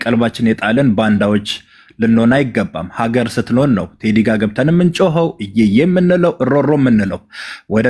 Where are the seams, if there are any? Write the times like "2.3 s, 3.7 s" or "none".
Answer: none